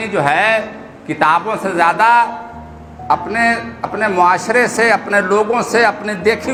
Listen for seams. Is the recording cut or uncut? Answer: uncut